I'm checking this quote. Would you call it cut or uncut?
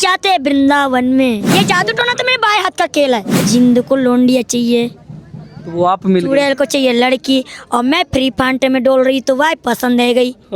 cut